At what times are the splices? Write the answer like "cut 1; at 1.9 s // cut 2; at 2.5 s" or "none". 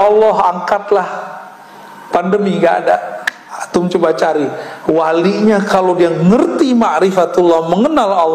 none